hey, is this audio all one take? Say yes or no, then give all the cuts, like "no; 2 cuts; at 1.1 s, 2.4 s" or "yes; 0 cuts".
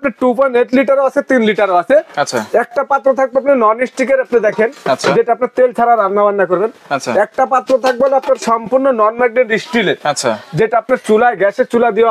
yes; 0 cuts